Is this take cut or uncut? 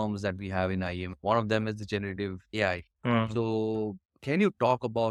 uncut